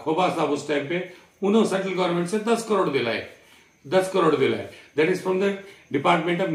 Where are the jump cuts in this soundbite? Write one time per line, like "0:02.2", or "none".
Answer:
none